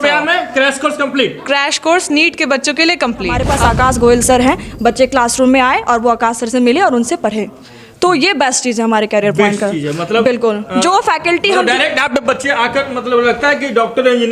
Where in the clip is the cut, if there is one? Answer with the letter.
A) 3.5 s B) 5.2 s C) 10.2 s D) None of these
A